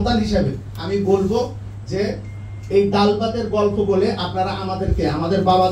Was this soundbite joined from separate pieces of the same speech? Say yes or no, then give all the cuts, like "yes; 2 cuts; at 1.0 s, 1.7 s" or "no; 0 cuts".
no; 0 cuts